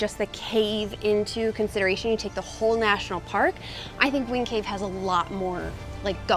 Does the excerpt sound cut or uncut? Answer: uncut